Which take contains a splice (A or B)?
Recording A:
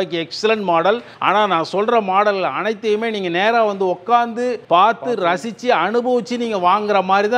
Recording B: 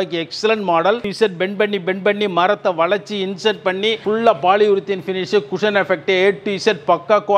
B